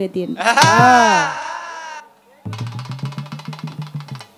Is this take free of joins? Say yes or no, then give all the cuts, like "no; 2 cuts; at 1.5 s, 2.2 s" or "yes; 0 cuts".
yes; 0 cuts